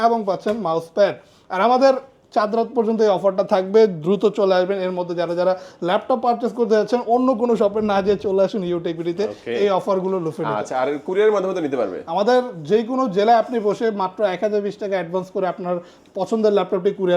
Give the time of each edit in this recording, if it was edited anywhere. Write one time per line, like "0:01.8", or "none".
none